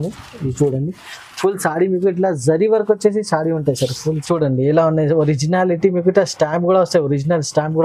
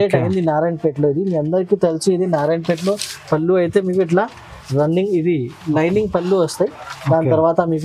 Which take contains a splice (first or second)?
first